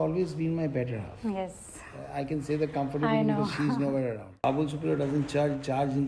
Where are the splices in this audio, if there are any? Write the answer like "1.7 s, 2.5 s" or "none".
4.4 s